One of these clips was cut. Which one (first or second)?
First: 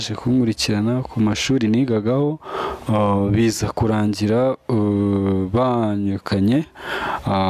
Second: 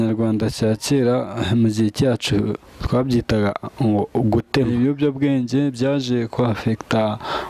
second